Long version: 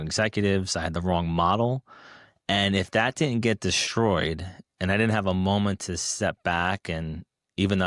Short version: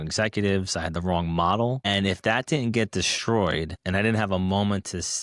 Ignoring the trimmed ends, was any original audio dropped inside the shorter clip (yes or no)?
yes